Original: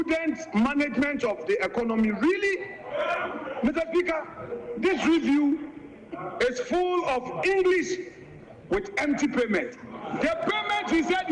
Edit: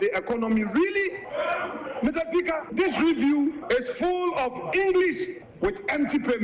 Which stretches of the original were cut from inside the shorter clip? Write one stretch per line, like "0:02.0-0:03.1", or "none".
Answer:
0:02.7-0:02.8
0:04.3-0:04.7
0:05.7-0:06.3
0:08.1-0:08.5